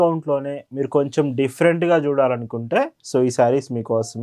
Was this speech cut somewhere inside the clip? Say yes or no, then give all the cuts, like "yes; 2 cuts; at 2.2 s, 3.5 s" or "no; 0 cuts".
no; 0 cuts